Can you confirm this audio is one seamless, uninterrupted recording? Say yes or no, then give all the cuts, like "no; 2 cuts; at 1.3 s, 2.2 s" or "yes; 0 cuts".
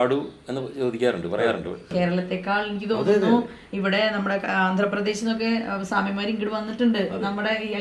no; 1 cut; at 1.9 s